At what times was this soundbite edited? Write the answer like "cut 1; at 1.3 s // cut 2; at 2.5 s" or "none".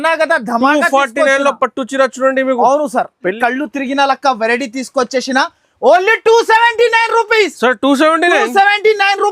cut 1; at 3.4 s